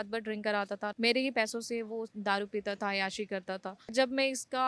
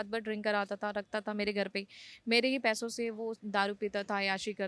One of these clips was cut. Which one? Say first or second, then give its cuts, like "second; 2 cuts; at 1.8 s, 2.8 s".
first; 2 cuts; at 0.9 s, 3.9 s